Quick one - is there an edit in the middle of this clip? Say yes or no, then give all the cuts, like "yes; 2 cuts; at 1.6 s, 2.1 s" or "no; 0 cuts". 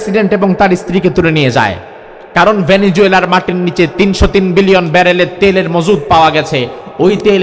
no; 0 cuts